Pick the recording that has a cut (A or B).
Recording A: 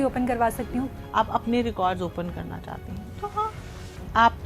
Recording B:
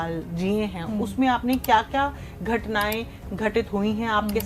A